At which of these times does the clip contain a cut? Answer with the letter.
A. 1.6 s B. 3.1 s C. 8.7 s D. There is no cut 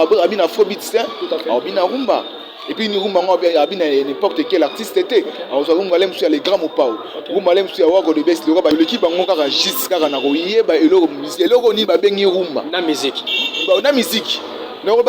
C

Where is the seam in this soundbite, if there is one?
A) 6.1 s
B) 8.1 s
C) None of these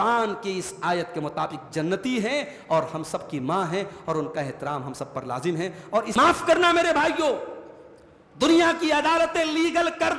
A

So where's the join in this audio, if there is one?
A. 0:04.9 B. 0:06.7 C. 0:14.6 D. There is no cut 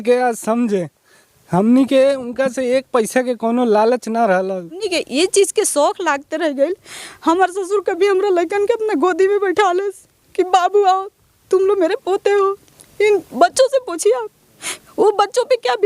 A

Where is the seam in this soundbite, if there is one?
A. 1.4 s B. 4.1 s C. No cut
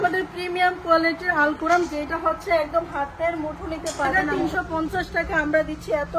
B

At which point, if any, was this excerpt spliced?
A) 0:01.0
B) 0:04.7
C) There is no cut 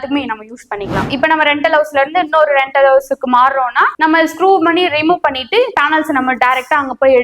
A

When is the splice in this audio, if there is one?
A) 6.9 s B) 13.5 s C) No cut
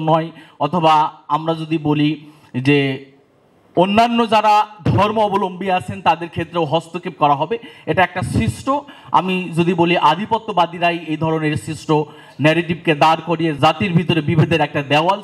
B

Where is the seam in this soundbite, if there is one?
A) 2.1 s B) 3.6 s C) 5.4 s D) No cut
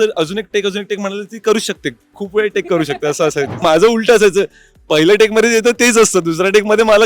B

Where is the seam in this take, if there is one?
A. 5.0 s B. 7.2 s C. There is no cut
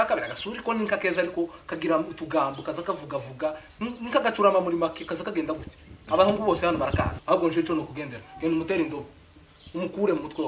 B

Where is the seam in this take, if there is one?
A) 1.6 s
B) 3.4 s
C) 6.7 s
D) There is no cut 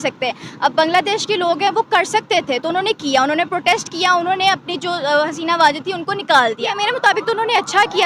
C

